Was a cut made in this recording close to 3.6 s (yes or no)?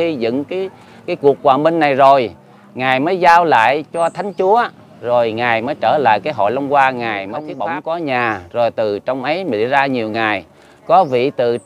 no